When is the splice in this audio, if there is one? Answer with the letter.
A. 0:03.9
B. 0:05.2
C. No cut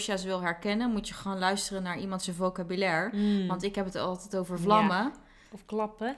C